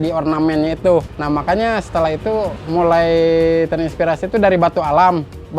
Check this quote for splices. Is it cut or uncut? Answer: cut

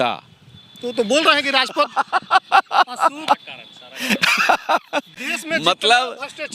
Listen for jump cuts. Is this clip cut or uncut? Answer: uncut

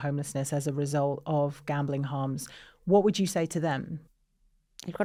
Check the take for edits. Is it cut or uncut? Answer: uncut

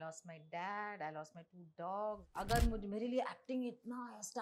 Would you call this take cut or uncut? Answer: cut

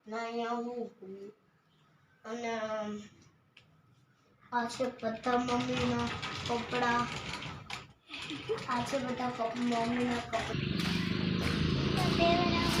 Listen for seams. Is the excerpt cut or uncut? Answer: cut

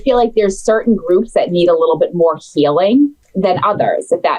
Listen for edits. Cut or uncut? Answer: cut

